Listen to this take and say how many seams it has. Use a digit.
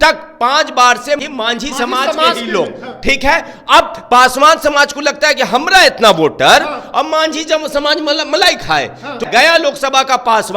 2